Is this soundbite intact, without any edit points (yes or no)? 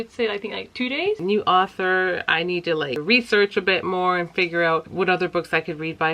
no